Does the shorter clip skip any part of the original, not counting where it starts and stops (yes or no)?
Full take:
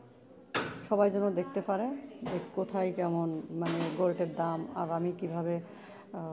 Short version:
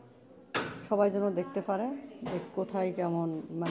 no